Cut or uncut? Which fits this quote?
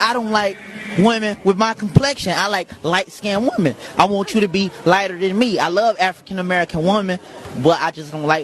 uncut